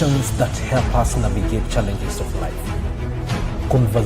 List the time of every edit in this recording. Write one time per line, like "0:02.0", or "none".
none